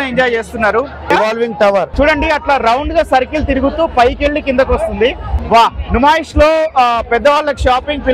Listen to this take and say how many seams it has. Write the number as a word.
three